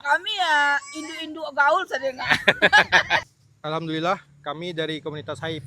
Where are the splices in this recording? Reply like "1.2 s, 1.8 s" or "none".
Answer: 3.2 s